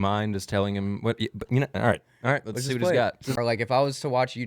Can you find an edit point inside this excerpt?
yes; 1 cut; at 3.4 s

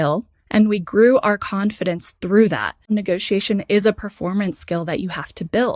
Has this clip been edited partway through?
yes; 1 cut; at 2.9 s

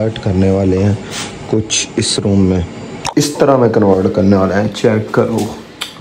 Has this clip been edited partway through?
yes; 1 cut; at 2.9 s

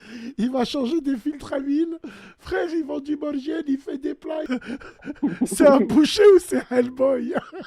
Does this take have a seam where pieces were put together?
yes; 1 cut; at 4.4 s

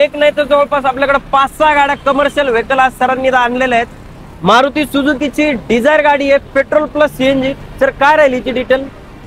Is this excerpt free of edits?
yes; 0 cuts

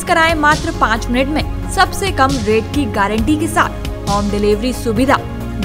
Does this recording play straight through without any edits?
yes; 0 cuts

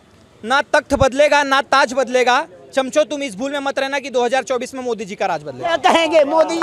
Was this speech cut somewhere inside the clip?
no; 0 cuts

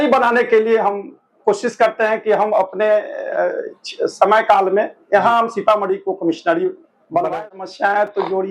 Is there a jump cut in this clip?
yes; 1 cut; at 7.5 s

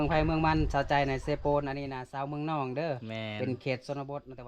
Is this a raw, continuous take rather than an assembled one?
yes; 0 cuts

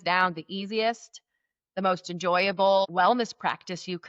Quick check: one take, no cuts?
no; 1 cut; at 2.9 s

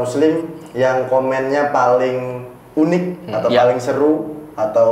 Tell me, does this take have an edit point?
no; 0 cuts

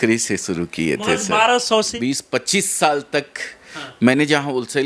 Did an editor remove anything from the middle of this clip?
yes; 1 cut; at 1.9 s

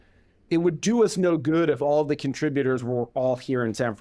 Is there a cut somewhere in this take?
yes; 1 cut; at 1.1 s

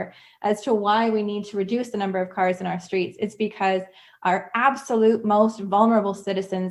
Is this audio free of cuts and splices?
yes; 0 cuts

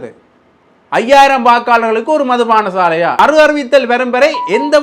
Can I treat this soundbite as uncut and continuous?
no; 1 cut; at 3.2 s

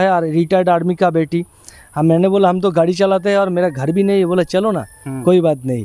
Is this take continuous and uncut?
yes; 0 cuts

